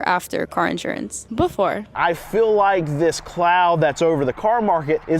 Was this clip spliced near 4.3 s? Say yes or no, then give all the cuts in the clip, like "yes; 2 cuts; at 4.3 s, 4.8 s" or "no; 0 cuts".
no; 1 cut; at 1.9 s